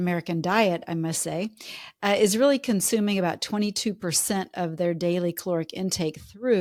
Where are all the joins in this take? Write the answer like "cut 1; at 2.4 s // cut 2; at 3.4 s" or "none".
none